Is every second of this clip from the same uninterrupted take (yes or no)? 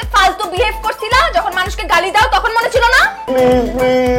no